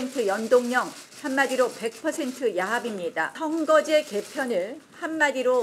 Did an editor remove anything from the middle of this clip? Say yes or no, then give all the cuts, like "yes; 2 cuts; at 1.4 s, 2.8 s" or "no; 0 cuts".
yes; 1 cut; at 3.3 s